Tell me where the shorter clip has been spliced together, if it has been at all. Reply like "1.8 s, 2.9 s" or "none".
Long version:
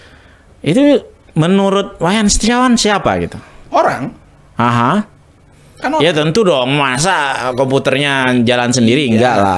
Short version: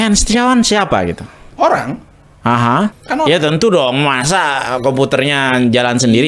3.0 s